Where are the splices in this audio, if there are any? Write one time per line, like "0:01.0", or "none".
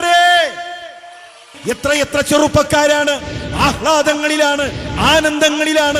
0:01.5